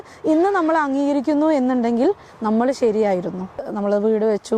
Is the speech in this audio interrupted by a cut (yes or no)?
yes